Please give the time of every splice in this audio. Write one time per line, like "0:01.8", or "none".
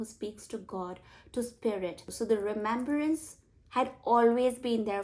0:02.1